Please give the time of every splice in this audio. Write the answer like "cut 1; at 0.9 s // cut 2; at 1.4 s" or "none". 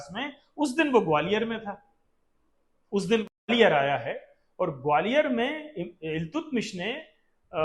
cut 1; at 3.5 s

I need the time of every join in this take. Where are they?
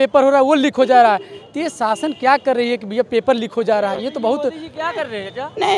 none

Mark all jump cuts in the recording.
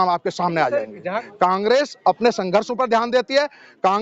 cut 1; at 1.2 s

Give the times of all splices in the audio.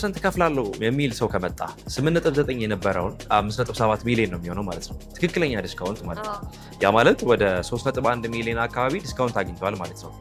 none

